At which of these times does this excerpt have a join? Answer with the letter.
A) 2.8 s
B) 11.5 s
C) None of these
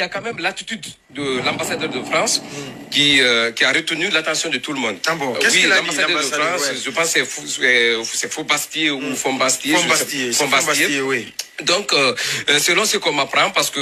C